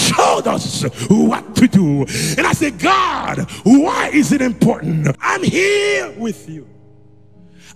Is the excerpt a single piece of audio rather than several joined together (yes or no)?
no